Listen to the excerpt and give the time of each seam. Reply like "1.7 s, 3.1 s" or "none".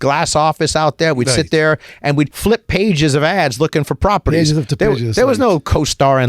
2.3 s